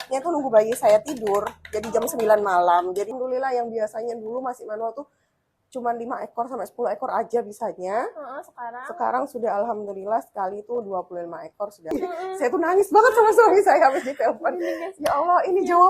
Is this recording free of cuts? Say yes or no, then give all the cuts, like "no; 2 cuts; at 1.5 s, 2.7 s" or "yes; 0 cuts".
no; 2 cuts; at 3.1 s, 11.9 s